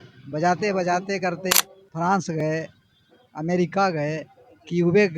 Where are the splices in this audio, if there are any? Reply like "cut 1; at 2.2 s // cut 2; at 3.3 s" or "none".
cut 1; at 1.5 s